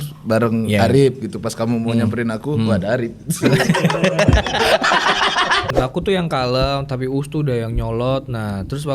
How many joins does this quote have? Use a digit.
1